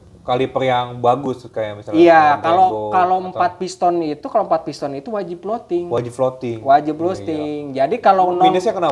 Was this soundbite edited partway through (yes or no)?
no